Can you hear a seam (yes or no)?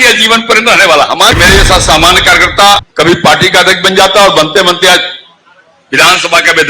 yes